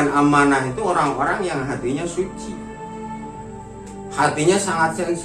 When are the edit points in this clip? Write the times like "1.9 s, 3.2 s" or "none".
2.3 s, 4.2 s